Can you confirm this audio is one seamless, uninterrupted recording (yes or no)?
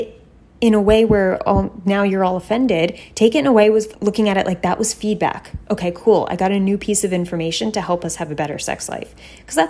no